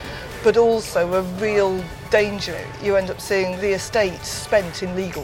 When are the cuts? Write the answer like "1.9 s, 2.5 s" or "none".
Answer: 2.4 s, 3.5 s